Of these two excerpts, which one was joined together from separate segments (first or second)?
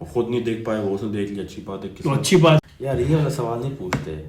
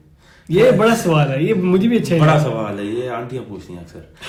first